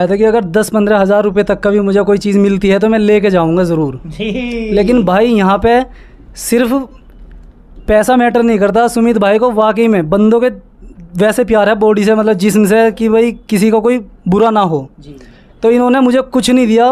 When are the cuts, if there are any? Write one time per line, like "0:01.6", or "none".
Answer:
none